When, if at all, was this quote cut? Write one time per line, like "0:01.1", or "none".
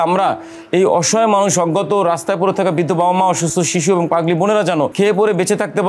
0:04.9